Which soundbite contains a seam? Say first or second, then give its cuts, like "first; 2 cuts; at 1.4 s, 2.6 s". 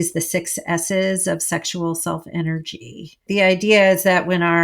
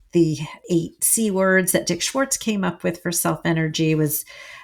first; 1 cut; at 3.2 s